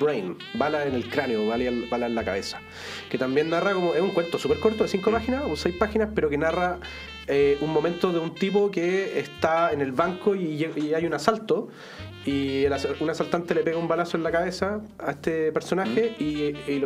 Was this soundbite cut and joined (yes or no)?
no